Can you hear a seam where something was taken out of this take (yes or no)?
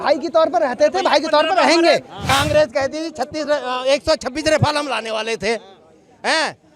yes